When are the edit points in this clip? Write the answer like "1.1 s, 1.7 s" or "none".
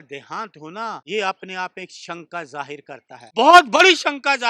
1.0 s, 3.2 s